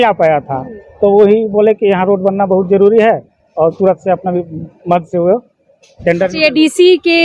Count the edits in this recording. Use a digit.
0